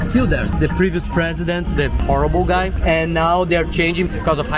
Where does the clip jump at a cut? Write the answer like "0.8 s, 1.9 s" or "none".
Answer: none